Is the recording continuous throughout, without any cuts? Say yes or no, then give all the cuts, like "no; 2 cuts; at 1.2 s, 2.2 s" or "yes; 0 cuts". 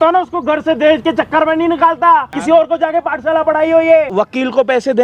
no; 2 cuts; at 2.3 s, 4.1 s